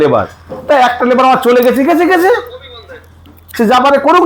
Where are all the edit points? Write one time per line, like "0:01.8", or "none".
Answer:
none